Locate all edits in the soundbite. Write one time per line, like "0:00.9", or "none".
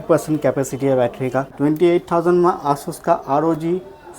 0:01.5